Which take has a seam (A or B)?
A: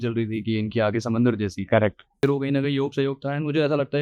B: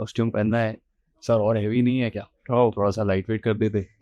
A